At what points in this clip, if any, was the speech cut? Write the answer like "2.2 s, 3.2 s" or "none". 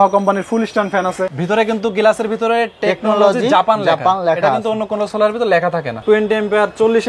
1.3 s, 6.0 s

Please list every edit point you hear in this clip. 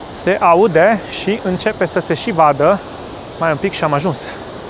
3.2 s

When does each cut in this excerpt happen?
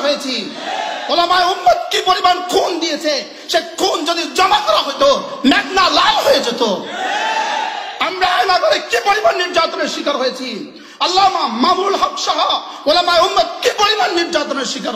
none

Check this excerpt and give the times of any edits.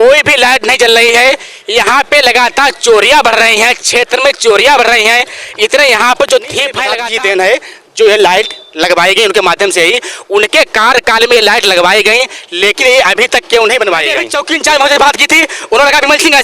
6.8 s, 14.3 s

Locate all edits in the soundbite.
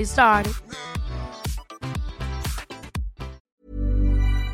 3.4 s

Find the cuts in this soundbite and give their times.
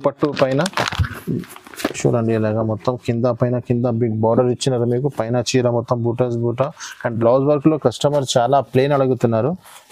7.0 s

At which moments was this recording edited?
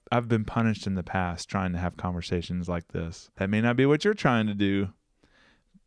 3.2 s

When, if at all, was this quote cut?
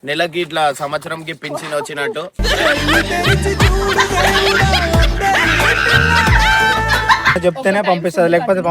7.4 s

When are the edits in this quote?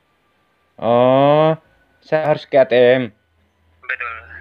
2.2 s

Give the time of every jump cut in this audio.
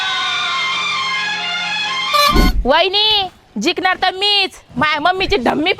2.5 s

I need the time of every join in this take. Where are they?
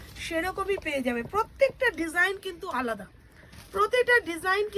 none

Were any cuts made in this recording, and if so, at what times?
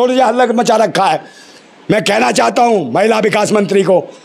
none

